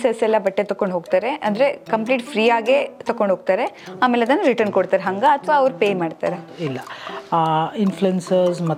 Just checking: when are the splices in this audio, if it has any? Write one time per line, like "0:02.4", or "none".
none